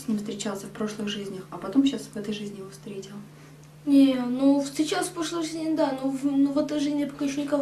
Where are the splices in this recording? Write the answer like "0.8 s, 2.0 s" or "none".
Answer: none

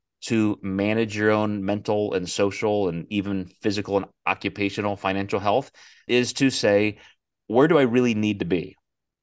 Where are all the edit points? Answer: 6.1 s

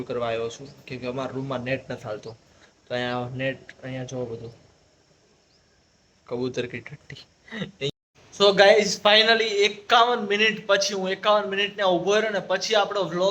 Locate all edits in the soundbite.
7.9 s

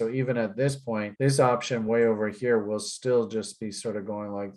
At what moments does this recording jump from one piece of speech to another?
none

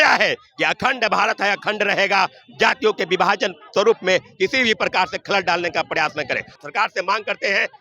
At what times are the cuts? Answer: 6.5 s

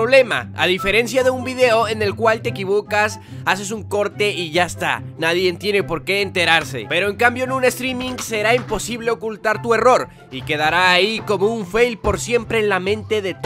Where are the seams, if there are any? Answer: 7.0 s

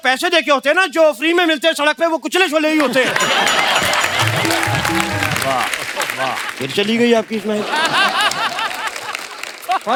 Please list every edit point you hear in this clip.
none

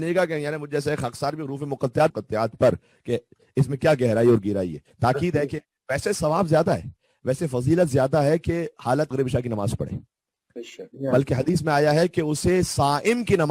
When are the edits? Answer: 2.1 s, 4.9 s, 9.1 s

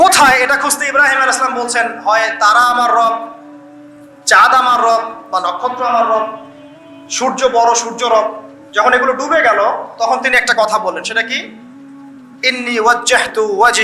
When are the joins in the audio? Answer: none

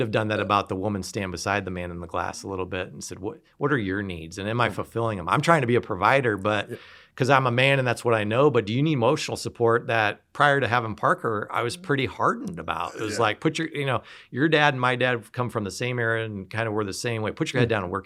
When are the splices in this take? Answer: none

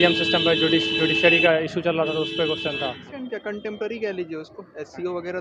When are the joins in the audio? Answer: 3.1 s

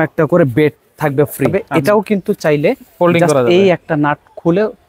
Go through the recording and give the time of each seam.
1.7 s

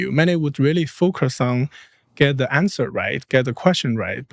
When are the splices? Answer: none

